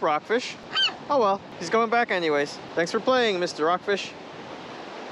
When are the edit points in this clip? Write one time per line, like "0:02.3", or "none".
none